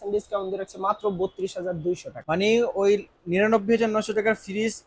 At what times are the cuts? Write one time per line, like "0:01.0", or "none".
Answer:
0:02.1